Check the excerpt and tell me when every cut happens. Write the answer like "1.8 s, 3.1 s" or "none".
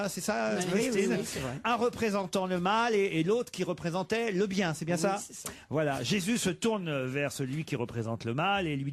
3.1 s